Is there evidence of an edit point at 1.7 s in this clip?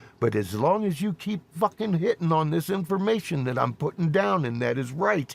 no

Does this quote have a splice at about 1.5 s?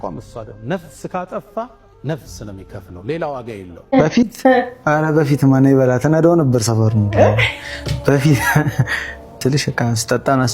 no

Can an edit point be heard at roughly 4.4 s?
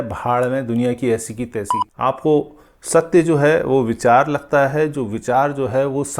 no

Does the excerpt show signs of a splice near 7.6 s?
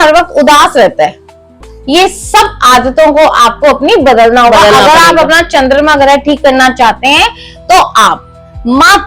no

